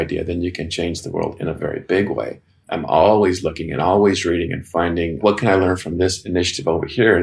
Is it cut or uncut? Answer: uncut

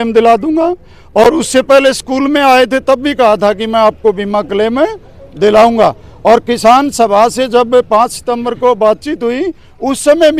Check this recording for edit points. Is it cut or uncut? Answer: uncut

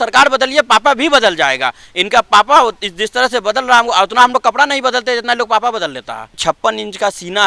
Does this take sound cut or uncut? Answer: cut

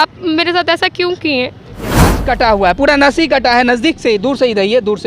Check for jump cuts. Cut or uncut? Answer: cut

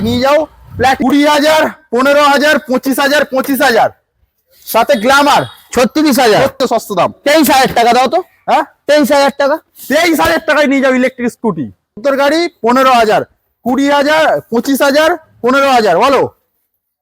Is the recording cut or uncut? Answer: cut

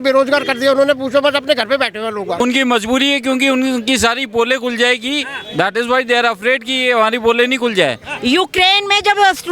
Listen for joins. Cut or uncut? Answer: cut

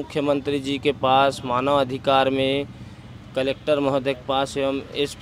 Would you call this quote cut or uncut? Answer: uncut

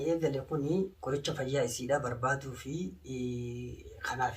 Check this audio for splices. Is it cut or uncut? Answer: cut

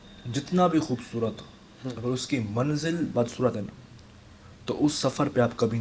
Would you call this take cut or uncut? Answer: uncut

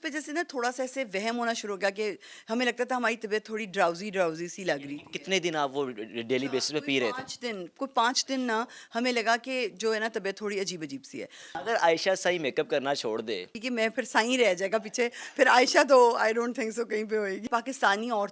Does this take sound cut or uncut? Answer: cut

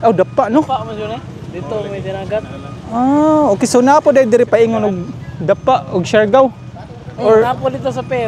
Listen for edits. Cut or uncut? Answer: cut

